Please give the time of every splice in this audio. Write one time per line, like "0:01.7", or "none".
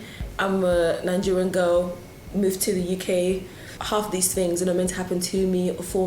0:03.8